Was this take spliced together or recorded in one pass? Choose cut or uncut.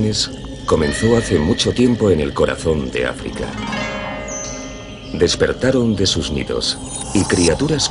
cut